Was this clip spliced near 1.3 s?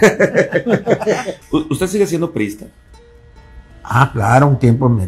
yes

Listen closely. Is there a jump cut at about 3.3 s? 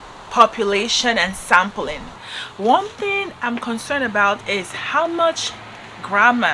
no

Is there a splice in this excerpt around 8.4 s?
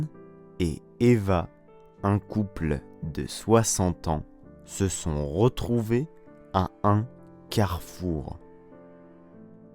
yes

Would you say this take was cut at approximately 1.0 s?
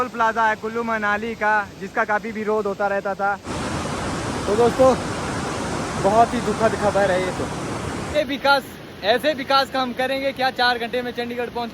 no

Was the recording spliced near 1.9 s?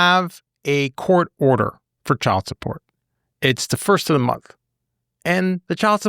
yes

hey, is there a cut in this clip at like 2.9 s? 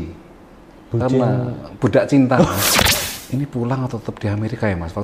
yes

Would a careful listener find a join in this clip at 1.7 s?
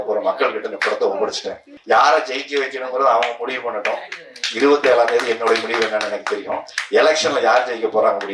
yes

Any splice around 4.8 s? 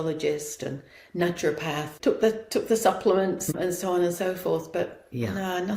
no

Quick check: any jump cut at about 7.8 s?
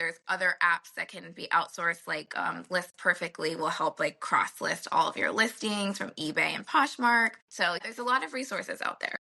yes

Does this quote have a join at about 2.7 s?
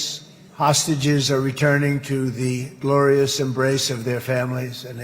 no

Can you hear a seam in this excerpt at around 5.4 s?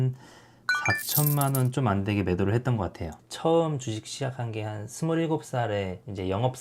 no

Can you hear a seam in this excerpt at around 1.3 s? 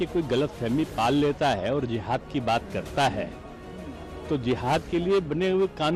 no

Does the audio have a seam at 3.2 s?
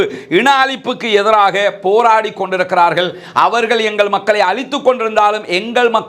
no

